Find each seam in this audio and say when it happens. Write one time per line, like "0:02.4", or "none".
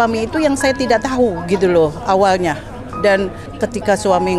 0:03.5